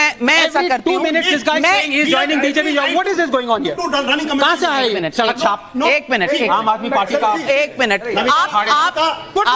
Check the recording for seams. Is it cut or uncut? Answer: uncut